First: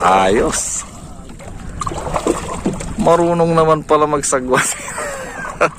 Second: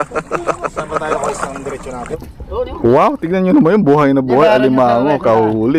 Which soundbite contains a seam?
second; 1 cut; at 2.3 s

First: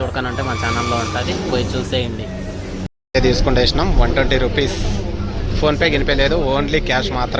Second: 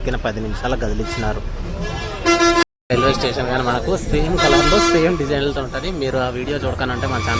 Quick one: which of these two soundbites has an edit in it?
first; 1 cut; at 2.9 s

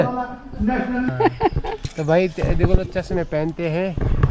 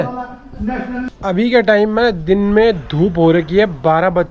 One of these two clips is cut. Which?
first; 1 cut; at 1.1 s

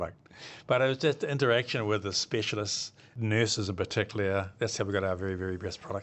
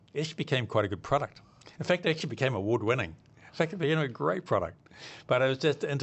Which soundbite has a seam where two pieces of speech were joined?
first; 1 cut; at 3.2 s

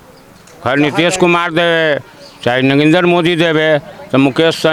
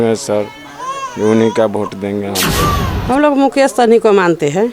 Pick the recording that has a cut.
second; 1 cut; at 2.9 s

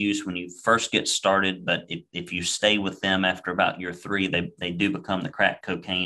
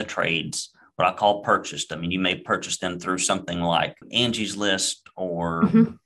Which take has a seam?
second; 1 cut; at 4.0 s

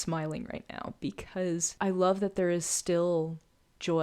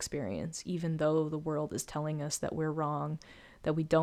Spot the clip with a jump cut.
first; 1 cut; at 1.7 s

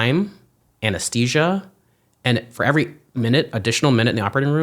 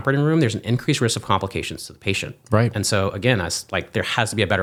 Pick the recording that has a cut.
first; 1 cut; at 3.0 s

